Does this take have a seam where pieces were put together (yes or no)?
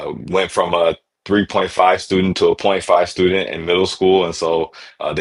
no